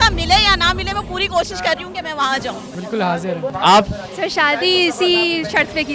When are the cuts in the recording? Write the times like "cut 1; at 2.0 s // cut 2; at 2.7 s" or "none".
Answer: cut 1; at 2.9 s